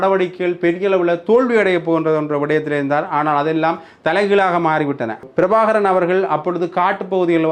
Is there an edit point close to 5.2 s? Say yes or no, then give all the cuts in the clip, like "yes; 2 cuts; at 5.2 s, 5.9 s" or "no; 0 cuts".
yes; 1 cut; at 5.2 s